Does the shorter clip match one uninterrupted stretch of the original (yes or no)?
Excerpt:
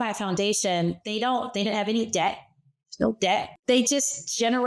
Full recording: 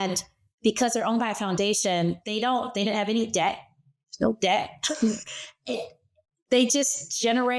no